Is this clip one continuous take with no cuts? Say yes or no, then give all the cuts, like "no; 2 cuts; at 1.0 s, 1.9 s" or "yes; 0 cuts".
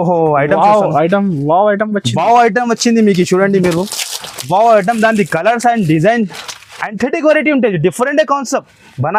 yes; 0 cuts